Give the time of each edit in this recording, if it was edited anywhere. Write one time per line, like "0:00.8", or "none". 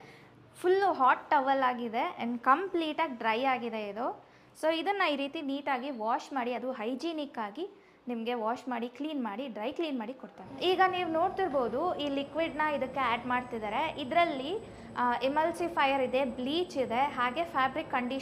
none

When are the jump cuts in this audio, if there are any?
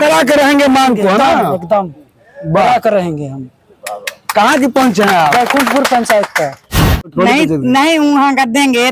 0:07.1

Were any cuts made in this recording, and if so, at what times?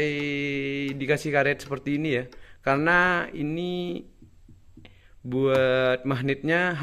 none

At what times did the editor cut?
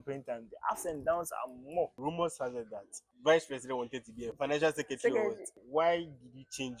0:02.0
0:03.0
0:04.3
0:05.6

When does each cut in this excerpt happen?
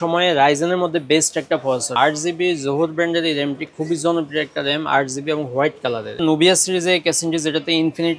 0:01.9
0:06.2

